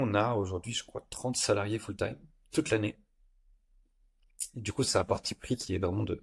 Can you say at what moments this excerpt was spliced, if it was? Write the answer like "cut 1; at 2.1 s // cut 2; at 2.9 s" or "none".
none